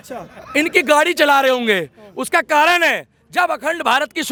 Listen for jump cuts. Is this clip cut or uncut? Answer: uncut